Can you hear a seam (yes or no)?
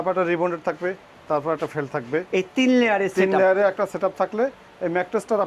no